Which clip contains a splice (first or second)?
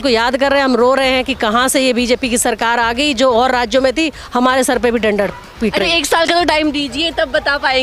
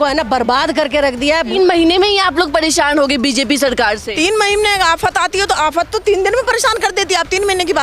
second